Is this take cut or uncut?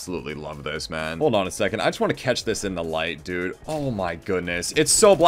uncut